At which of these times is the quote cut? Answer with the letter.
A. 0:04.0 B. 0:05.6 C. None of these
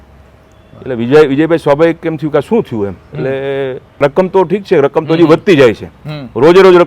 A